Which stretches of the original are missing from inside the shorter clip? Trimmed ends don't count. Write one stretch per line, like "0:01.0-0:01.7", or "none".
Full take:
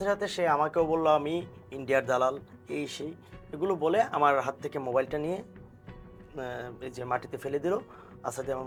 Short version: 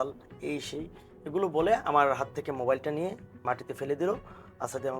0:05.6-0:07.0